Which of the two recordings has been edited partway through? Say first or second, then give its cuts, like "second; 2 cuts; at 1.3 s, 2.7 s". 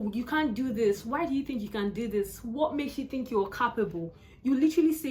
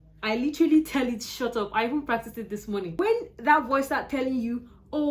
second; 1 cut; at 2.9 s